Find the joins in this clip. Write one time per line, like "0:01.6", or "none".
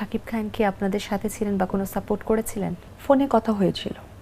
0:02.9